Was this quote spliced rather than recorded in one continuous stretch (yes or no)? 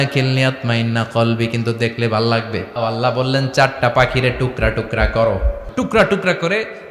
yes